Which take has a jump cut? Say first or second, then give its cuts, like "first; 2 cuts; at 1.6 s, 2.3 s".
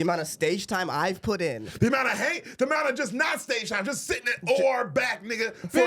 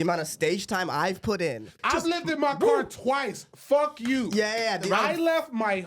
second; 2 cuts; at 1.7 s, 4.8 s